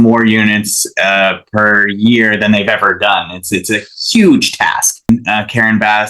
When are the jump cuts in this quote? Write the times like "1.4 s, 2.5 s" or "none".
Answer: 5.1 s